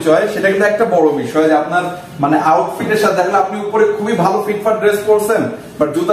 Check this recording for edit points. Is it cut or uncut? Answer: uncut